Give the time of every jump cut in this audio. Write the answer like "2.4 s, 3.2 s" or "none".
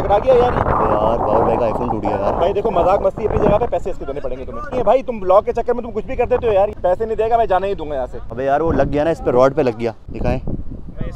4.7 s, 6.8 s, 8.1 s, 10.1 s